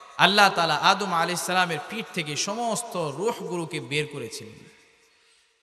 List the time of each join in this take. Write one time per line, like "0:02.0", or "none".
none

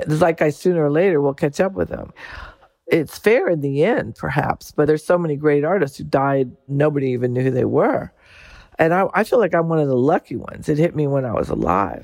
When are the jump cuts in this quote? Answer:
0:02.9
0:04.9
0:06.7

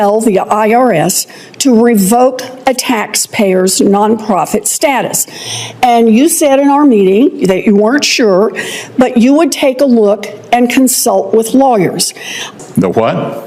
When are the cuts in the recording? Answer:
0:12.5

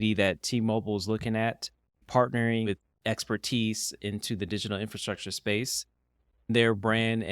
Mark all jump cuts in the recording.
0:02.0
0:02.7
0:06.5

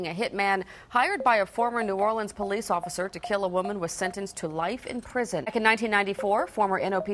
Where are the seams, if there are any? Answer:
0:05.5

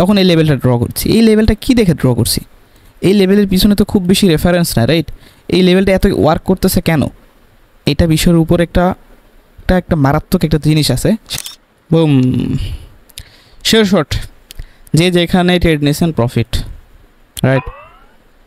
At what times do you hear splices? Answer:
0:11.3

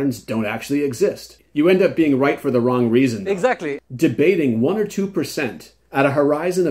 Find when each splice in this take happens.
0:01.4
0:03.8

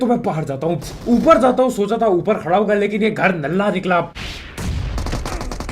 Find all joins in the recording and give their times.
0:04.2

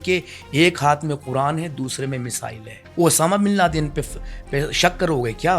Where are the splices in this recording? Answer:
none

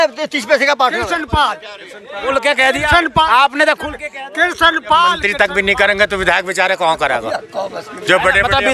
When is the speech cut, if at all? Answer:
0:01.1
0:05.2

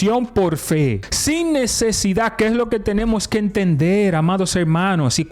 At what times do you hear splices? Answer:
0:01.1

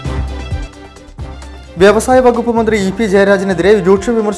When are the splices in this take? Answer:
0:01.3

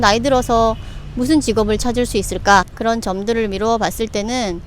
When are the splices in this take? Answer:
0:02.7

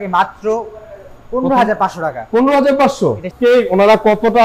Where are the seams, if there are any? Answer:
0:03.3

